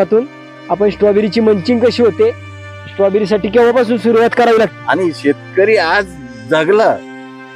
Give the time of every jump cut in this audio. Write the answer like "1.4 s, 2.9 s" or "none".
4.7 s